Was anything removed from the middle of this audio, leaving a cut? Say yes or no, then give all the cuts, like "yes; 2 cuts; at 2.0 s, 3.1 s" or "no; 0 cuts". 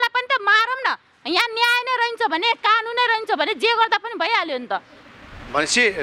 no; 0 cuts